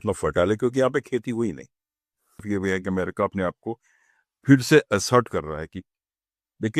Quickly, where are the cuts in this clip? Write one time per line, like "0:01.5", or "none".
0:02.4